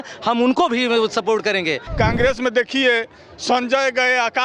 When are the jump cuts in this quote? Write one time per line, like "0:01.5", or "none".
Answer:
0:01.8